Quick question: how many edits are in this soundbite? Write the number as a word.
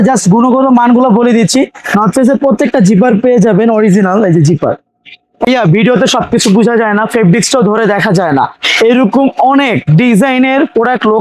one